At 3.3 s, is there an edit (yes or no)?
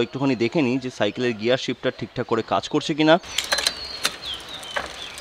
yes